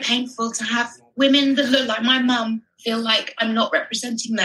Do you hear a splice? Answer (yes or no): yes